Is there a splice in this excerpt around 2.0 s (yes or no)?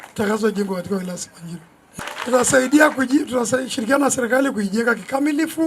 yes